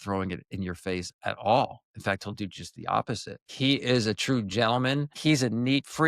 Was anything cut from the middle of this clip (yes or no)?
yes